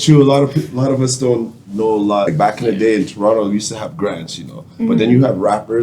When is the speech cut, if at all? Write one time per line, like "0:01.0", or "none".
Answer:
0:02.3